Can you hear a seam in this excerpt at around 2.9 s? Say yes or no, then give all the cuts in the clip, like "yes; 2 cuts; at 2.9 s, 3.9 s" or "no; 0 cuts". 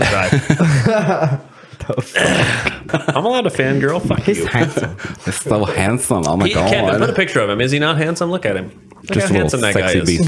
yes; 1 cut; at 2.9 s